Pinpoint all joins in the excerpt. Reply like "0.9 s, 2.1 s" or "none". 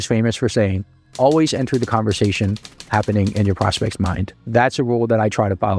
4.4 s